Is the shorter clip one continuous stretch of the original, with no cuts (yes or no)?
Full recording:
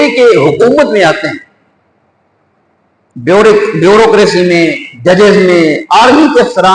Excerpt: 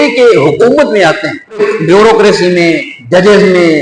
no